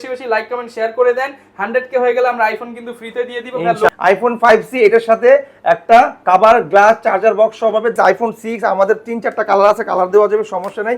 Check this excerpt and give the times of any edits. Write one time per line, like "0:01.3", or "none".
0:03.9
0:07.9